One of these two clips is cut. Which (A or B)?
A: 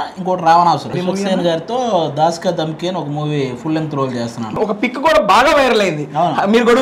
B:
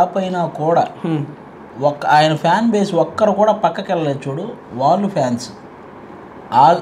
A